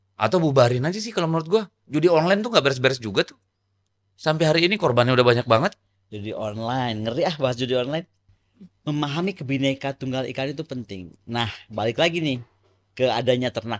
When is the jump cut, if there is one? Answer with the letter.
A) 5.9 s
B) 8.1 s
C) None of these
B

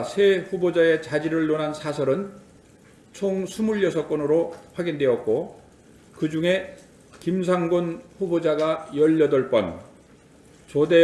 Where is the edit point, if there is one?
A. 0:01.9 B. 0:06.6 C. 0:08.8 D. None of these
C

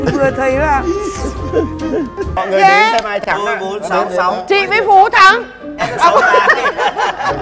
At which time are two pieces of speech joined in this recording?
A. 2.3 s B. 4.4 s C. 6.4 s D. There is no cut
A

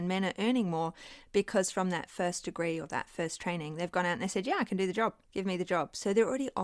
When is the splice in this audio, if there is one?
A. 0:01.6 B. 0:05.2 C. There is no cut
B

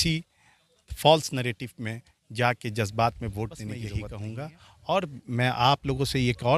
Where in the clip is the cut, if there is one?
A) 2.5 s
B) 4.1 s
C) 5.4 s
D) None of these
B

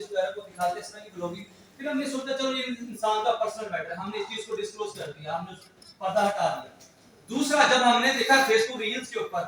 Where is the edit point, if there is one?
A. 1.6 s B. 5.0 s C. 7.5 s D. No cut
D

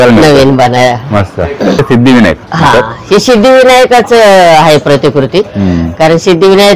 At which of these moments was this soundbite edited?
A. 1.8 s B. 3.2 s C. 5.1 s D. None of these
A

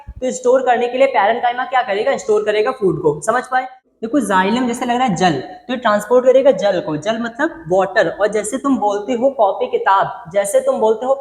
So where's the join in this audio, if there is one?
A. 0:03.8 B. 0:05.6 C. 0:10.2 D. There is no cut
A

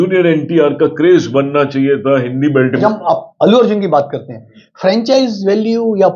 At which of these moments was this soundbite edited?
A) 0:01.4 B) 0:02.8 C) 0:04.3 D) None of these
B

